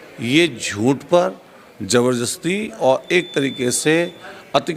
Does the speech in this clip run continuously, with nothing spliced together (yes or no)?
yes